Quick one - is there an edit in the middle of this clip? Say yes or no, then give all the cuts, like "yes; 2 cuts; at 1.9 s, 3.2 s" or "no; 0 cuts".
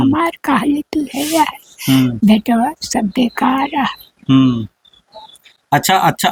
no; 0 cuts